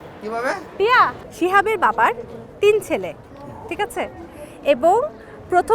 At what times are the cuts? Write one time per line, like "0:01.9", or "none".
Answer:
0:01.2